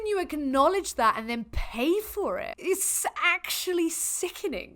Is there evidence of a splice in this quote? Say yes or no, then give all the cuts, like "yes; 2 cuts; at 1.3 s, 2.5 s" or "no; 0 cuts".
yes; 1 cut; at 2.6 s